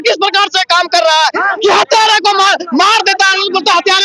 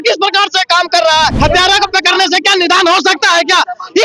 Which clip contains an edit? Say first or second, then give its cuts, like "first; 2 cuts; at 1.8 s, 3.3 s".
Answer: second; 1 cut; at 1.3 s